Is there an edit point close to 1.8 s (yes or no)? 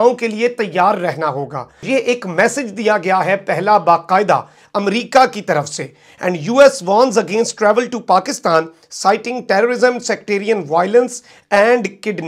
yes